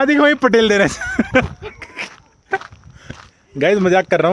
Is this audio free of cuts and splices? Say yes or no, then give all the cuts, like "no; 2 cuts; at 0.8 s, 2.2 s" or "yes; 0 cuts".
yes; 0 cuts